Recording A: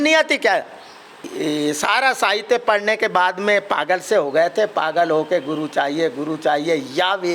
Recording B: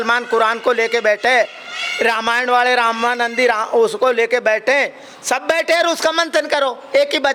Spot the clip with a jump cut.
A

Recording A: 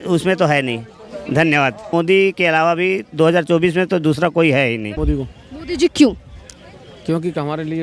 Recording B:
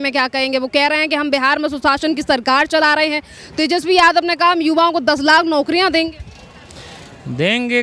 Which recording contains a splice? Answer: A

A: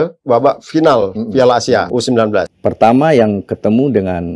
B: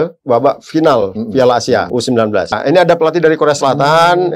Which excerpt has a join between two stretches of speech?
A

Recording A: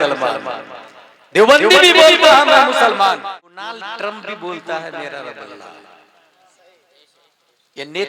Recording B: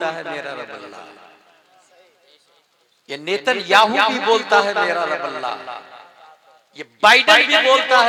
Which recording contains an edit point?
A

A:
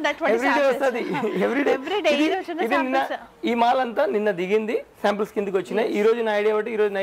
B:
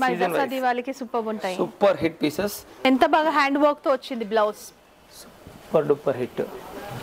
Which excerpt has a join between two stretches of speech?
B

